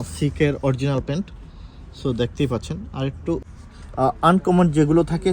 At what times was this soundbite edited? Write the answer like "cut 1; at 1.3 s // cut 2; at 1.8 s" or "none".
cut 1; at 3.5 s